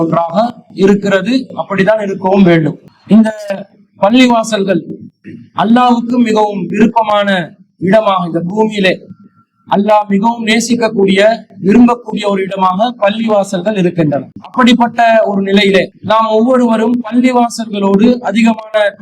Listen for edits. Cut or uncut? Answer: cut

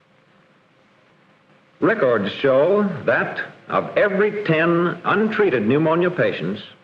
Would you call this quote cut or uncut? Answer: cut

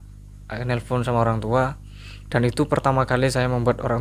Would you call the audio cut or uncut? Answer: uncut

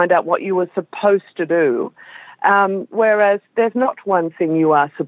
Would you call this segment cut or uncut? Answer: uncut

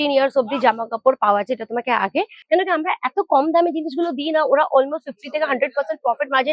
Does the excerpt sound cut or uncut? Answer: cut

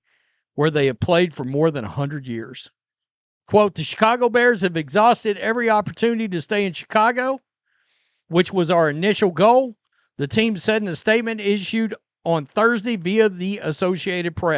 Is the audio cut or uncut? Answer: cut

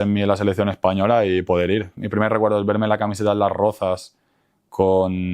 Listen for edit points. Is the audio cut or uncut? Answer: cut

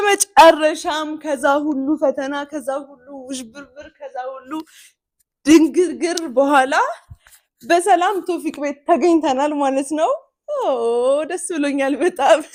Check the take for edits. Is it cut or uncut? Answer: uncut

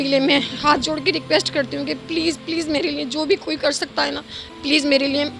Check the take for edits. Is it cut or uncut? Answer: uncut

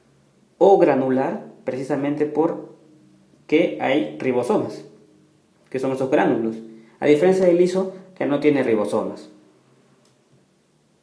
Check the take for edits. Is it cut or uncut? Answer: uncut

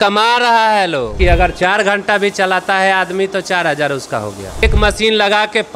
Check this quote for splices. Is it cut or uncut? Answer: cut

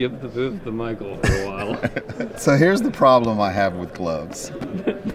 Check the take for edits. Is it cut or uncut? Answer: cut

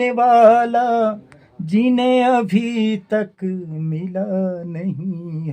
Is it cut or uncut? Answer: uncut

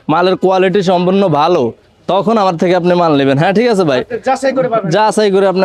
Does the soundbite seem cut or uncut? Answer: uncut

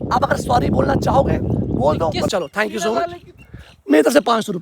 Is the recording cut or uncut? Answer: cut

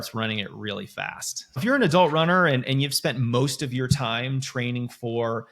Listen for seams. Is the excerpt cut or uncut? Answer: cut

